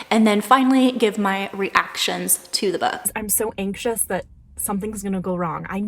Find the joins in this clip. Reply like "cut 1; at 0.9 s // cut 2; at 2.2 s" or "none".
cut 1; at 3.2 s